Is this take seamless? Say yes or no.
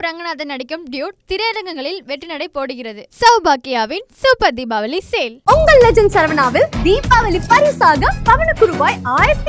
yes